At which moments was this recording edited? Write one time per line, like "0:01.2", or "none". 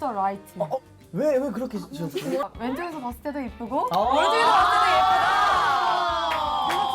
0:00.9
0:02.5